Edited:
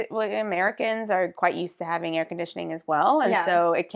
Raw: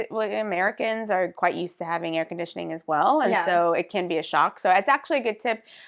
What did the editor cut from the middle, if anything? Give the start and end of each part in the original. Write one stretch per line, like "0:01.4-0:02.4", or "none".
none